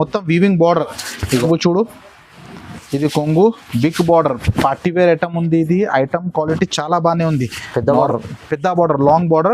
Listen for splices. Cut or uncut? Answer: cut